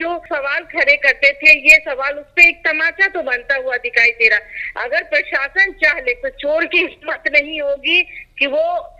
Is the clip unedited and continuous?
yes; 0 cuts

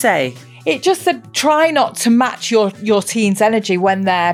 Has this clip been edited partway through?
no; 0 cuts

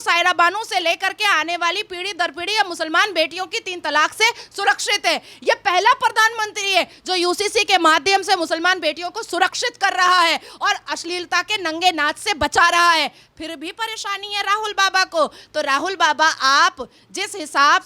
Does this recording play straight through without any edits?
yes; 0 cuts

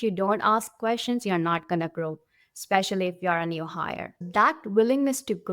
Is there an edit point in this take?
yes; 1 cut; at 4.2 s

